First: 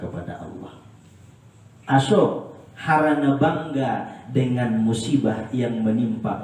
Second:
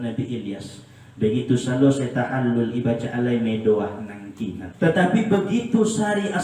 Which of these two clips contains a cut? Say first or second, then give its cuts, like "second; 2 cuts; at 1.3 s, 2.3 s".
second; 1 cut; at 4.6 s